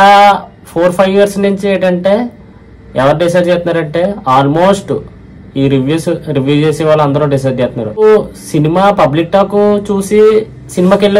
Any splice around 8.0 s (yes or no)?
yes